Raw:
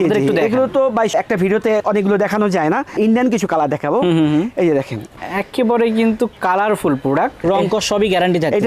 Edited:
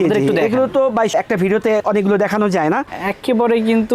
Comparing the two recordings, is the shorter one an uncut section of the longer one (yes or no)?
no